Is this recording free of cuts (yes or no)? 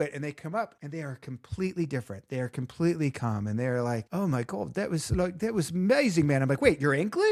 yes